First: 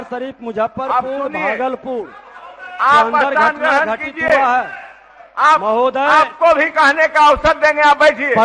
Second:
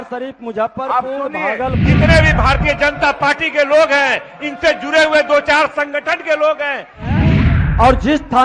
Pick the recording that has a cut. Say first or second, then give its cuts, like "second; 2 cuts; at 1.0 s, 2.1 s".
second; 2 cuts; at 1.8 s, 7.2 s